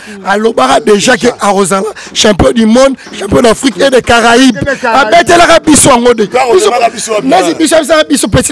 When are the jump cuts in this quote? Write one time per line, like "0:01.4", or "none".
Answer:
none

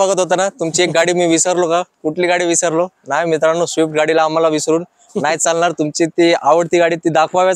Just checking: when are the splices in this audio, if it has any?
none

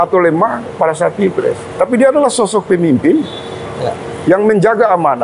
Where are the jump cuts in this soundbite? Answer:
none

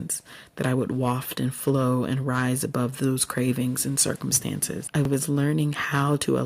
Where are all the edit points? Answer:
0:04.7

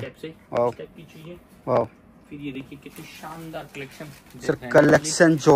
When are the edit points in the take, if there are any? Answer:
none

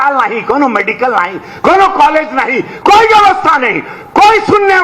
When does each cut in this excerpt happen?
none

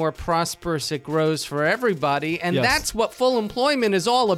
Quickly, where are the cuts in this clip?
none

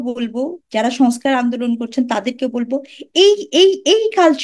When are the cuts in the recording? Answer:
none

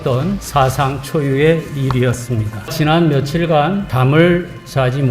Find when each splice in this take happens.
0:02.7
0:03.9

